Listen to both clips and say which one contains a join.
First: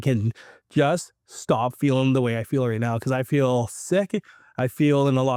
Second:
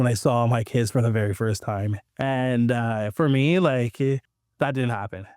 second; 2 cuts; at 2.0 s, 4.4 s

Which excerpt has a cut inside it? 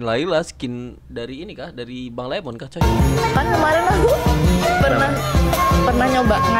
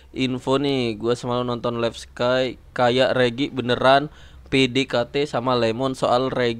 first; 1 cut; at 2.8 s

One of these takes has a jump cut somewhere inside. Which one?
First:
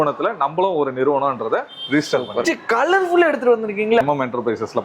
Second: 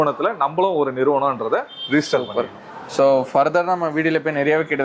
first; 2 cuts; at 2.7 s, 4.0 s

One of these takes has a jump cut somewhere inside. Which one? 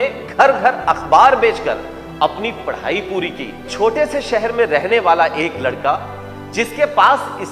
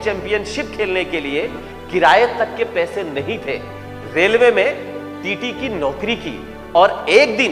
first; 1 cut; at 3.7 s

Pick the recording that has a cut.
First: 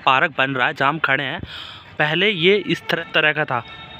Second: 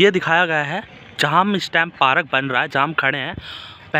first; 1 cut; at 3.0 s

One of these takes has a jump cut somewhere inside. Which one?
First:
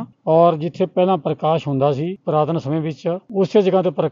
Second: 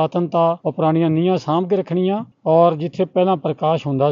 first; 1 cut; at 3.2 s

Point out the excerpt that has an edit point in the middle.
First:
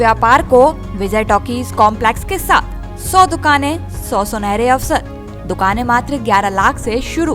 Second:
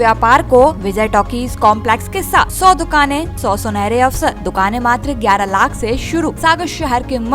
second; 5 cuts; at 0.8 s, 2.5 s, 3.3 s, 4.4 s, 6.4 s

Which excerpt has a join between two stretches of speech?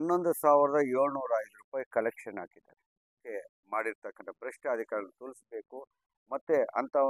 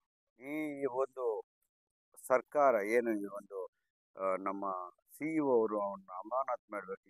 first; 1 cut; at 3.2 s

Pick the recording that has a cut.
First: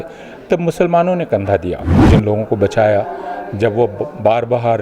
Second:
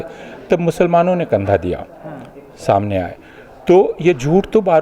first; 1 cut; at 1.9 s

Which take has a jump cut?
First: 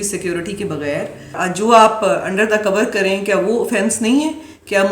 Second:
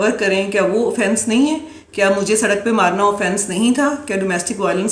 first; 1 cut; at 1.3 s

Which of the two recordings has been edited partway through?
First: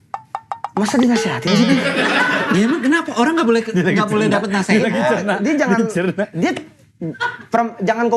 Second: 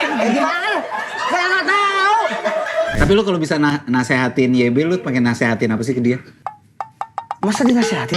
second; 1 cut; at 2.9 s

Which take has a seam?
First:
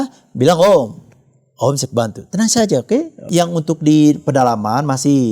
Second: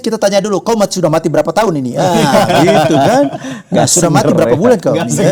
first; 1 cut; at 3.3 s

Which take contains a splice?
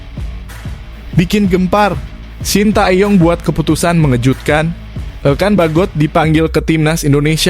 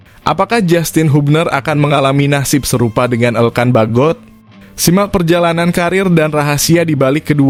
first; 1 cut; at 1.2 s

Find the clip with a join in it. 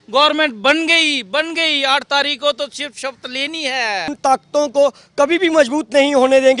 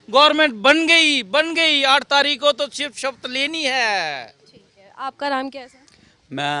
first; 1 cut; at 4.1 s

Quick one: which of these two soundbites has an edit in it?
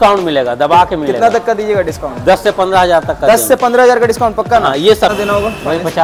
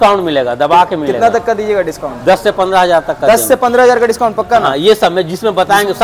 first; 1 cut; at 5.1 s

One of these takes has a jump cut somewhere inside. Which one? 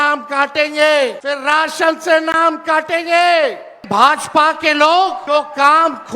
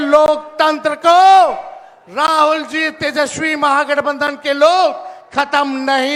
first; 3 cuts; at 1.2 s, 3.8 s, 5.2 s

